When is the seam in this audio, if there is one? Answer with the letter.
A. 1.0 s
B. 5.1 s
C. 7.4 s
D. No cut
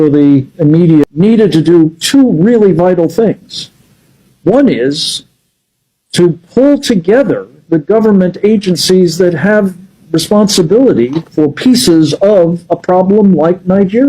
A